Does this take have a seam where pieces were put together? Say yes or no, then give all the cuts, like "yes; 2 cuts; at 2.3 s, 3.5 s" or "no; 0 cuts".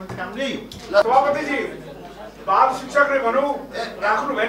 yes; 1 cut; at 1.0 s